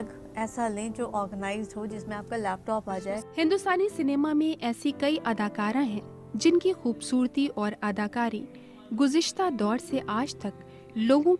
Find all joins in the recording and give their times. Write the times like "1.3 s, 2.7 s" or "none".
3.3 s